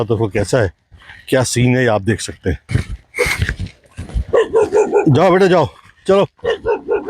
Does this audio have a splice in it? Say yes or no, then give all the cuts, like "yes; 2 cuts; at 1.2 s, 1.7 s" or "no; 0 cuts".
yes; 1 cut; at 2.6 s